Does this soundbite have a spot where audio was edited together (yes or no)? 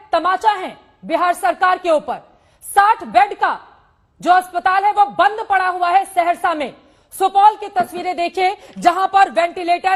no